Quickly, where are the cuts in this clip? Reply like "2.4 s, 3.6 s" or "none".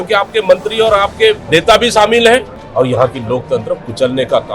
1.4 s, 2.6 s